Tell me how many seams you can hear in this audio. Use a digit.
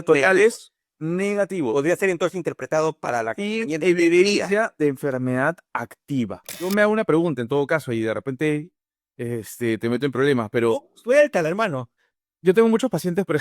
1